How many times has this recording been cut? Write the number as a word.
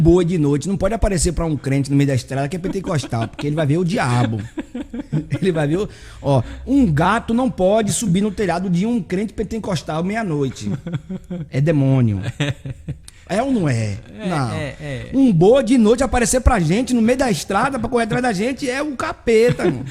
zero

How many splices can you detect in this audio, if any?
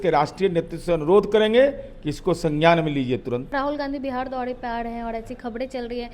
one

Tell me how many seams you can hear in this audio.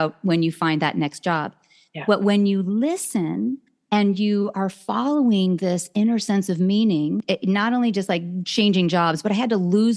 one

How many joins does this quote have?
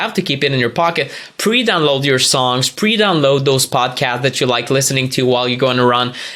zero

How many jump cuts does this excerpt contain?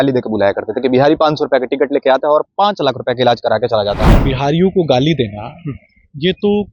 one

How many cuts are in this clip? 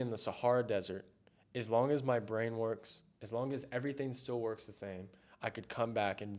zero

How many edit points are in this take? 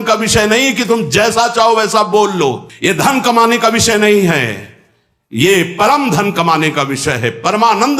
one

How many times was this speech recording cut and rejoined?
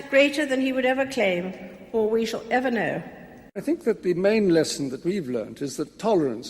one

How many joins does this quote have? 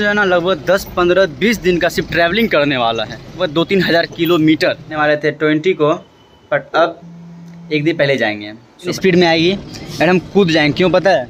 three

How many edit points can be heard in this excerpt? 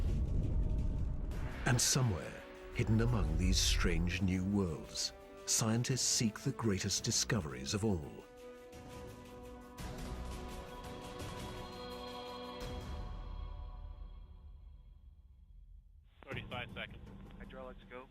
one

